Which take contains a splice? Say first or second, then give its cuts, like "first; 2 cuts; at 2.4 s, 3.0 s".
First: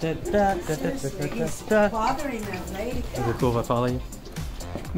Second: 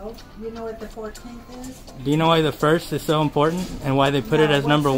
first; 1 cut; at 3.1 s